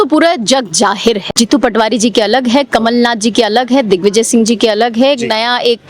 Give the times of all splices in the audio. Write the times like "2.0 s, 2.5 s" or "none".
1.2 s